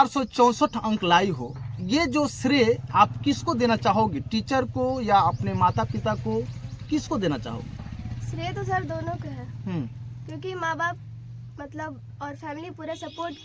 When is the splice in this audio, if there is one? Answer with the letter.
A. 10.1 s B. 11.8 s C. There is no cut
C